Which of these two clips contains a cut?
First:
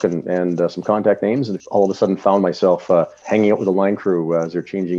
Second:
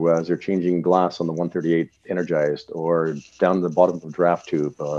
first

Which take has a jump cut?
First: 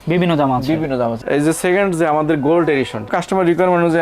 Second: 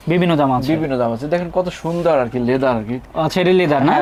first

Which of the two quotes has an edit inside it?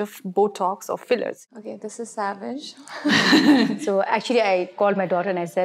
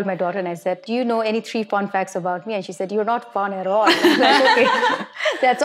first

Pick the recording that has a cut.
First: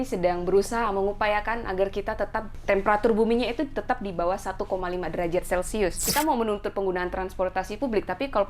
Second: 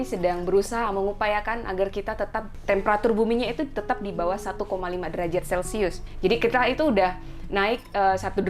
first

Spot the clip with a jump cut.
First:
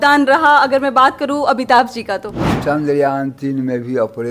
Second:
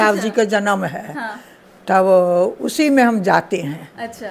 first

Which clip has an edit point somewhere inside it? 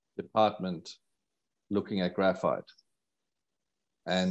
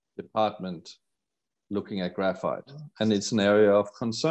second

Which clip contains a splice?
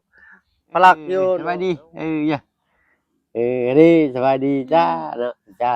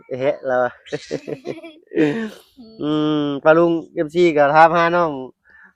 first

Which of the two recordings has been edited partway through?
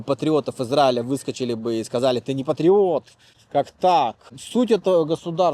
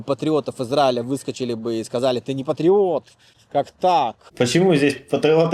first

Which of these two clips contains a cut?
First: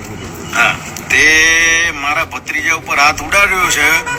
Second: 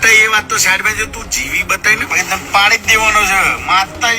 second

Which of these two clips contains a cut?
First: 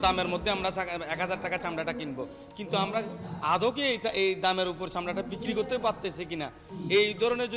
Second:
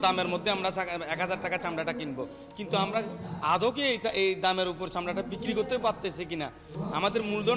first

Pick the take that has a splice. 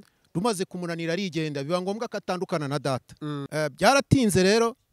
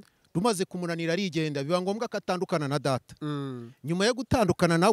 first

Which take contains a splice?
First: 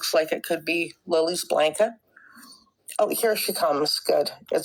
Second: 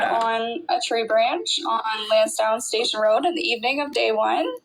second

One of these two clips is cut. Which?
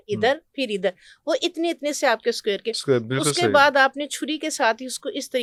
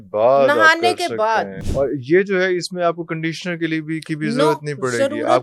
second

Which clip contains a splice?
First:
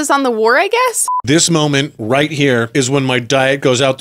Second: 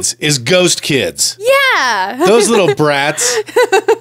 first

